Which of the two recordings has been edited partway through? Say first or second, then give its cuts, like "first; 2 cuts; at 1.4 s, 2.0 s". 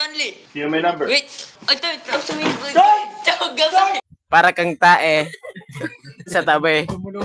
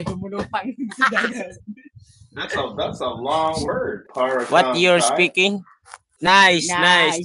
first; 1 cut; at 4.1 s